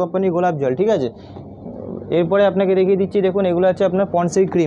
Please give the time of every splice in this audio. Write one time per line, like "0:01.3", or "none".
none